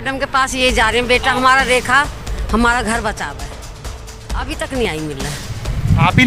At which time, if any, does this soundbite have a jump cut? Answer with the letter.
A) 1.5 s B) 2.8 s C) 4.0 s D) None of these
C